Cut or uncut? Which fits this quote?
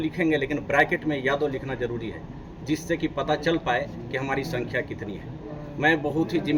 uncut